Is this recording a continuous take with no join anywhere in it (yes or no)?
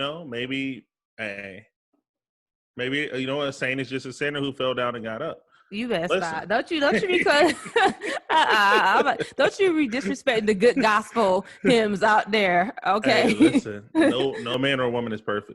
no